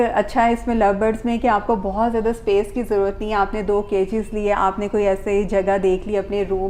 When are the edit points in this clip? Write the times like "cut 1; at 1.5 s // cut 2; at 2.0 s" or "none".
none